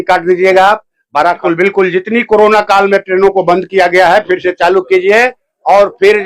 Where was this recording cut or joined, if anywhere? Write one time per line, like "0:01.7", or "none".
0:01.4